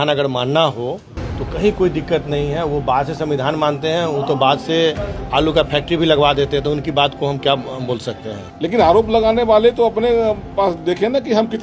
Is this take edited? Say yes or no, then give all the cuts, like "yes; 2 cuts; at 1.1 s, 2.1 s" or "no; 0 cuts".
yes; 1 cut; at 8.4 s